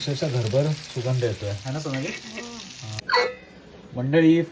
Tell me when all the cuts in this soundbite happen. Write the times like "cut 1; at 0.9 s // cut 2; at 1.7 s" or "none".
cut 1; at 3.0 s

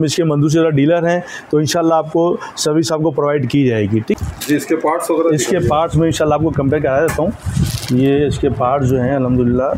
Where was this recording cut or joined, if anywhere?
cut 1; at 4.1 s

